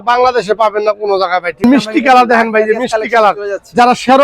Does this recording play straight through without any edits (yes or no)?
no